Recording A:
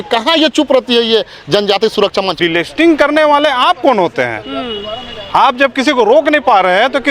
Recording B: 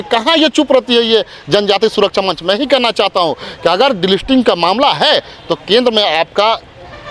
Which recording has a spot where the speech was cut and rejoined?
A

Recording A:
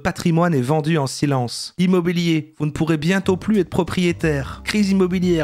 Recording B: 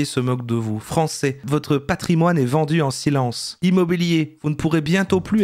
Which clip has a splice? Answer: A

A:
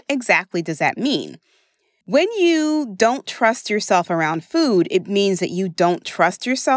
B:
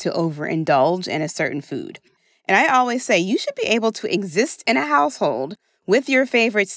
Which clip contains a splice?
B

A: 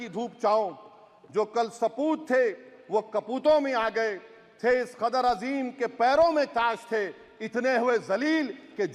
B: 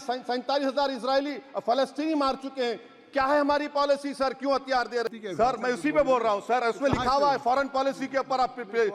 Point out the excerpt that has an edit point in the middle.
B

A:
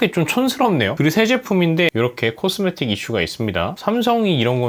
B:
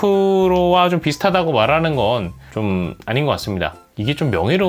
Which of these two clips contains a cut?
A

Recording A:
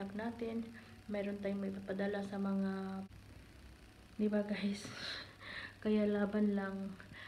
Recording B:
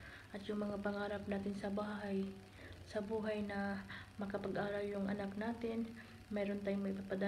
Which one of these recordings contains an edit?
A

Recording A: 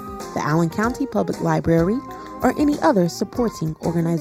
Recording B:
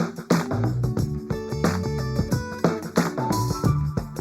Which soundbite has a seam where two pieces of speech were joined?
B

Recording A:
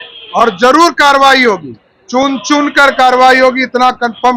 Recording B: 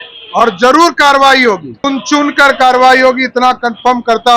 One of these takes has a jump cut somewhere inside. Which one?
B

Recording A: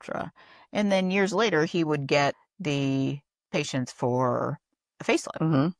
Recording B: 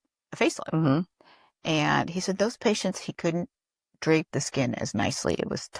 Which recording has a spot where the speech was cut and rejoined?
A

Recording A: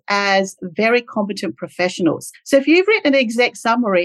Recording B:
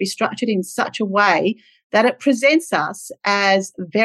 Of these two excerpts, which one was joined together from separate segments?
A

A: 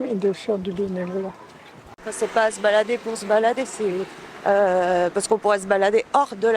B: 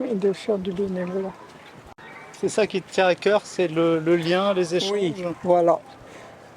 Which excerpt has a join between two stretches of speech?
A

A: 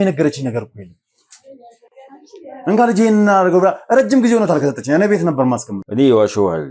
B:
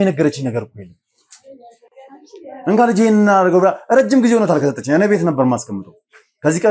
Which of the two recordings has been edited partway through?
A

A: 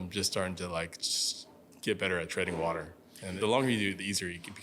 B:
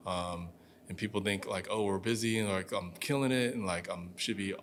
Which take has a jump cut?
A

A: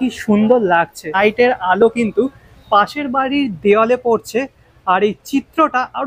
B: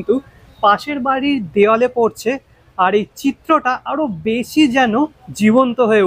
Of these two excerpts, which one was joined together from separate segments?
A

